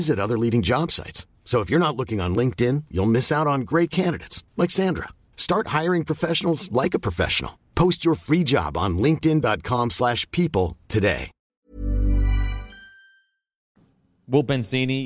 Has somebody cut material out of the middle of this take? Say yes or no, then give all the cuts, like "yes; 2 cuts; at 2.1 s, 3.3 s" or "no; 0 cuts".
no; 0 cuts